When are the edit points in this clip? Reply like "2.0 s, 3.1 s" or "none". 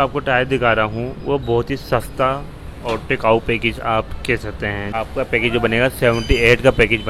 4.9 s